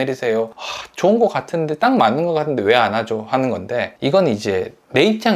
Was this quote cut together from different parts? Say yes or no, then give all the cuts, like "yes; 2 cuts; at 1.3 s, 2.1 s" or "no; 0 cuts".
no; 0 cuts